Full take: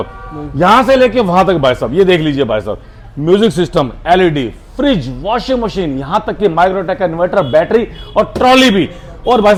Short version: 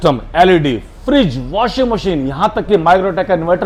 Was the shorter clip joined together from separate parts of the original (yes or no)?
no